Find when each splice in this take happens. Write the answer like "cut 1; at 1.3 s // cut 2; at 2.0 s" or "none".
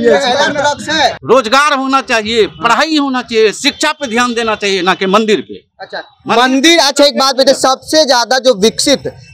cut 1; at 1.2 s